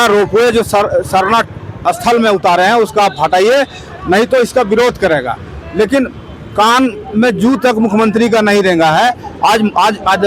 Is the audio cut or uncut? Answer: uncut